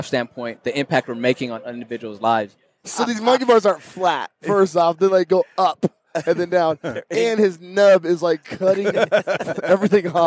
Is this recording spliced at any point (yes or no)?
yes